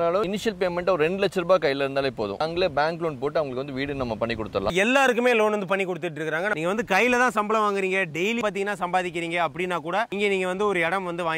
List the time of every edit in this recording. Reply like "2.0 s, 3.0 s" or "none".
2.4 s, 4.7 s, 6.5 s, 8.4 s